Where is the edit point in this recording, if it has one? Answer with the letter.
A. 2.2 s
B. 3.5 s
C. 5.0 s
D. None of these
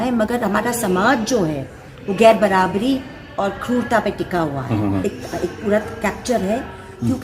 C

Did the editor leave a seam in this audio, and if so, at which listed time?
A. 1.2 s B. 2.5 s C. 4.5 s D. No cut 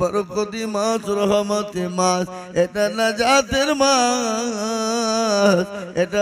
D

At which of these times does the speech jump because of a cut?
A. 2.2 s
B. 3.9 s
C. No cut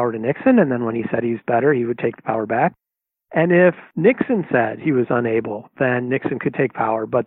B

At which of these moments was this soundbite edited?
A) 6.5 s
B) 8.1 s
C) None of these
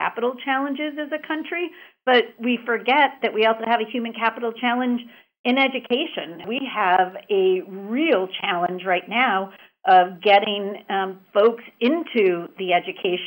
A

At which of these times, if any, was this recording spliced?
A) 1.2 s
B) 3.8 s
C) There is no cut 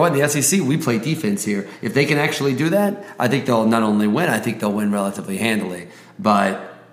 C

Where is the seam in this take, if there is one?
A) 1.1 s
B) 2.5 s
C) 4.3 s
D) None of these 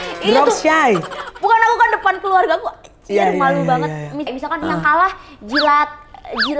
C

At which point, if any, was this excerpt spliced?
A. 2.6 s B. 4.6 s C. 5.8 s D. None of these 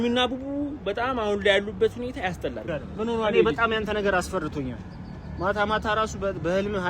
A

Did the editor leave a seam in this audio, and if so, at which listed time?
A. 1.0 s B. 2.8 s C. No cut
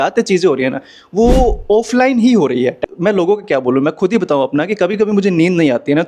B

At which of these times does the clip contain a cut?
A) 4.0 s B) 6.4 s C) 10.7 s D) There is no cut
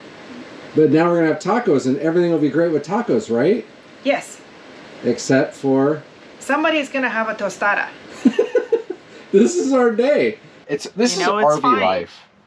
C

